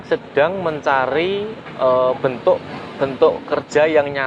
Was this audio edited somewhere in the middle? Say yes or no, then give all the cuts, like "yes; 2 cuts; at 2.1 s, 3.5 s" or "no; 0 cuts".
no; 0 cuts